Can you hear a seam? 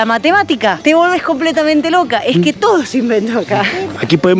no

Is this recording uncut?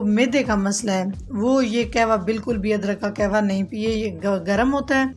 yes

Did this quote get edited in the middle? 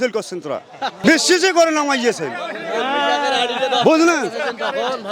no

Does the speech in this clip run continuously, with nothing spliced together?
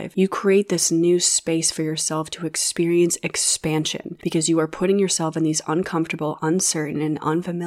no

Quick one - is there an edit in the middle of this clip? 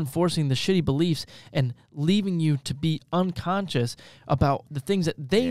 no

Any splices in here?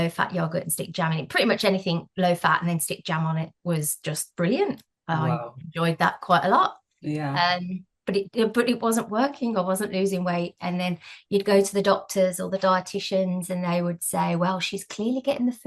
no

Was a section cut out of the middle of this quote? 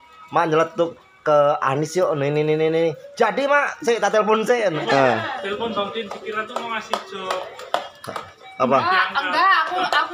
yes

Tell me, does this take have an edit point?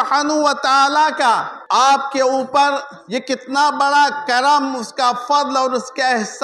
yes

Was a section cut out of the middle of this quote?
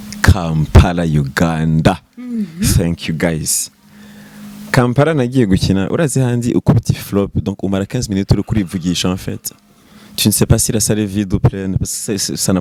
no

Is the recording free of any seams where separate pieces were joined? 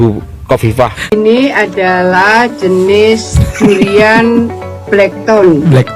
no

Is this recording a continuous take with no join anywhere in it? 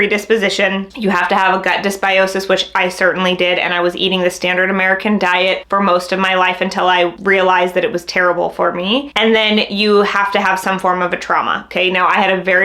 yes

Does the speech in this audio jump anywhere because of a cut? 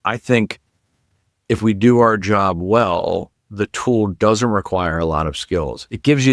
no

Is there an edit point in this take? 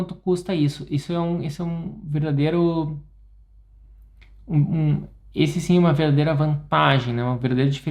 no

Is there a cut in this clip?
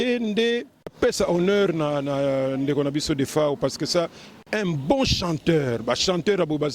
yes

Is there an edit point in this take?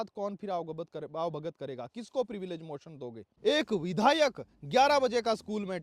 yes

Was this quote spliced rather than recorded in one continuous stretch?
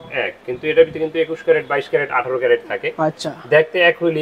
no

